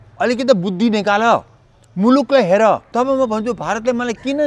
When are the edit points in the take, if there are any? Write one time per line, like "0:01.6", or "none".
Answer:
0:02.9